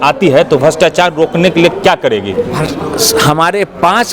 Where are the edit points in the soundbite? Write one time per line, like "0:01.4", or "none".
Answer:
none